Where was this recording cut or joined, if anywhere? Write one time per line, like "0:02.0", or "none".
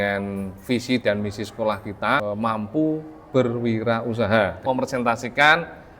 0:02.2
0:04.6

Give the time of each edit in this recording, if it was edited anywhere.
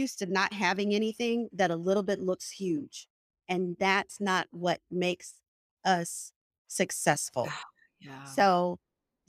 none

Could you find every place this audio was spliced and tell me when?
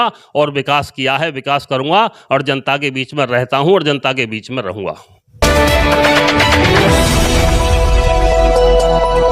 0:05.4

